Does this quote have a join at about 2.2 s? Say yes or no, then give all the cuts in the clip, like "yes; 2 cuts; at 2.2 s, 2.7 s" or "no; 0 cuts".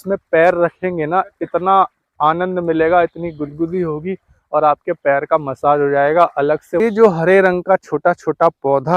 no; 1 cut; at 6.8 s